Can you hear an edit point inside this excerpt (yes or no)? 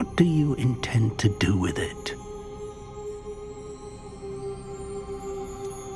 no